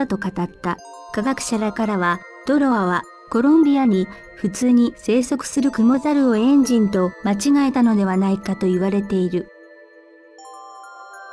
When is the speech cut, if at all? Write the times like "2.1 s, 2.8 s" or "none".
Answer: none